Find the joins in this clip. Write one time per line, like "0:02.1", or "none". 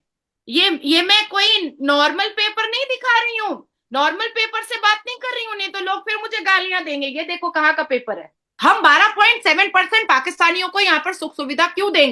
0:08.4